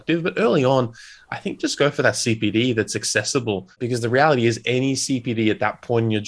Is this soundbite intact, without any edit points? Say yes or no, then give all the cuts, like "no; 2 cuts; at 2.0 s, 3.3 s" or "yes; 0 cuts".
no; 1 cut; at 3.8 s